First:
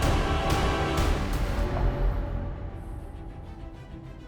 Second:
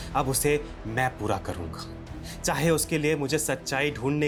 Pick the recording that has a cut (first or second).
first